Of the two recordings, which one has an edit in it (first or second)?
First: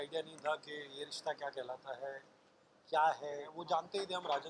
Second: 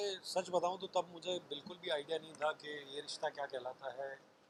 first